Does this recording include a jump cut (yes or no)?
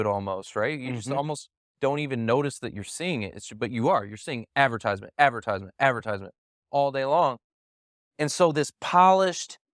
no